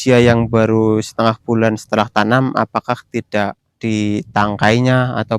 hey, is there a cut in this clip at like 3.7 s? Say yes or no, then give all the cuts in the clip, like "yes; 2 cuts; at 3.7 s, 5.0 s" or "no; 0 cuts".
yes; 1 cut; at 3.7 s